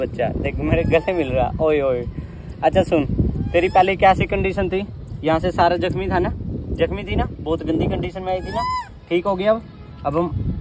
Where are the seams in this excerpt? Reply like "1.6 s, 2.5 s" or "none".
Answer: none

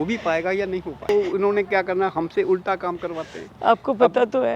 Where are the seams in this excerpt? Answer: 1.1 s

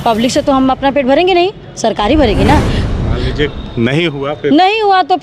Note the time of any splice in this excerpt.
2.9 s

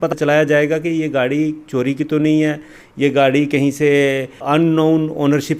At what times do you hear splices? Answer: none

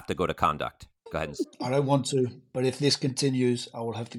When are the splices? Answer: 1.0 s

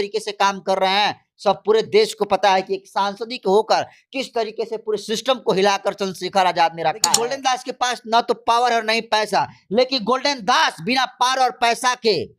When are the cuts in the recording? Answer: 7.1 s

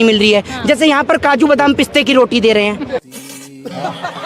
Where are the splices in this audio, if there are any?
3.0 s

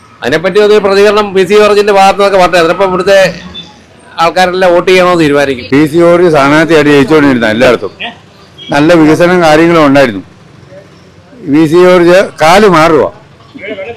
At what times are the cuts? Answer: 5.6 s

